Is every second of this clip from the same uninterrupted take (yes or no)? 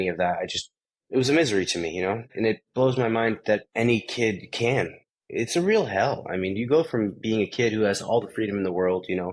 no